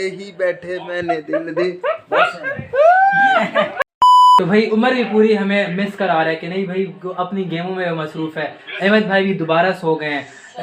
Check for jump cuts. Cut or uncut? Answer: uncut